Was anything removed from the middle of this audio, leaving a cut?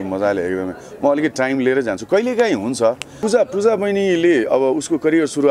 yes; 1 cut; at 3.2 s

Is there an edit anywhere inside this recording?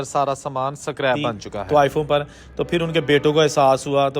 yes; 1 cut; at 1.5 s

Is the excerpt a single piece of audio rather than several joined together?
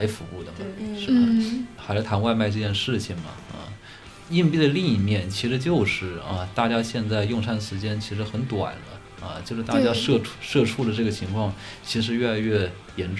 no; 1 cut; at 1.8 s

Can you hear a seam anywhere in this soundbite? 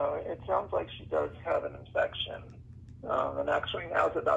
no; 0 cuts

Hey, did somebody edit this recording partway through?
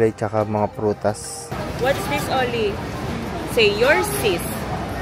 yes; 1 cut; at 1.5 s

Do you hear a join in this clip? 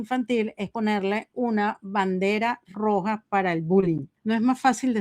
yes; 1 cut; at 4.1 s

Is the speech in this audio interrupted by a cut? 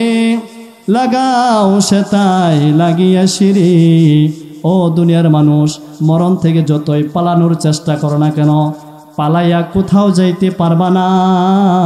no; 0 cuts

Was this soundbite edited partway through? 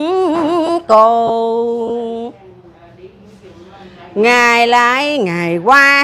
no; 0 cuts

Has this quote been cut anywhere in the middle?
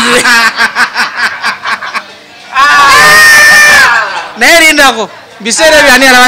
no; 0 cuts

